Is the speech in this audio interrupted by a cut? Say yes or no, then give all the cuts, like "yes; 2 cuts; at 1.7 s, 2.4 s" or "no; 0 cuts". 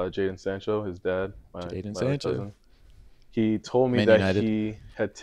no; 0 cuts